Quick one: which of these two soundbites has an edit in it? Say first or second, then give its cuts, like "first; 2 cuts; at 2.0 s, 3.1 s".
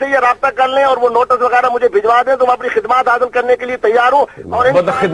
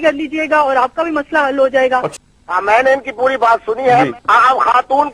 second; 1 cut; at 2.1 s